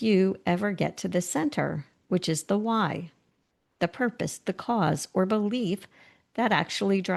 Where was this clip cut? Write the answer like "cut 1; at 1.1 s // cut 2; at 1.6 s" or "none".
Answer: none